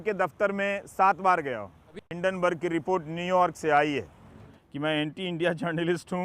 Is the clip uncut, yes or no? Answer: no